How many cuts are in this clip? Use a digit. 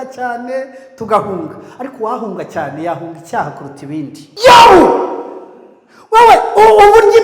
1